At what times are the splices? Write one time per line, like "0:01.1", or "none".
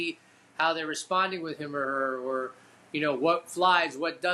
none